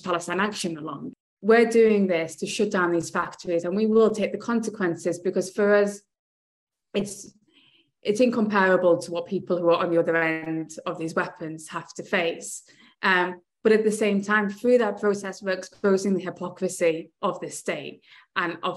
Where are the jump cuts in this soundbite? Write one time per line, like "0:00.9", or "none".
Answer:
0:01.1